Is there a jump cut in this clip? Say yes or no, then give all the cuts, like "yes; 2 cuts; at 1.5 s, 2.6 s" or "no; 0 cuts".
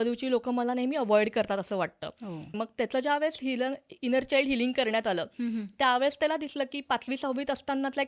yes; 1 cut; at 2.6 s